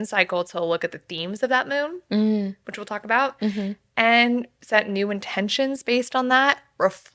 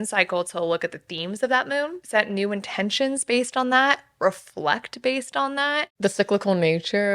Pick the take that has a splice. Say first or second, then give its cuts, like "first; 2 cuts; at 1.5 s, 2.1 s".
second; 2 cuts; at 2.0 s, 5.8 s